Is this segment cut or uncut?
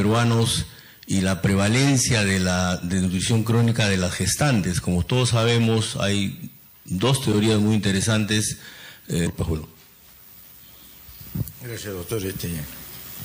uncut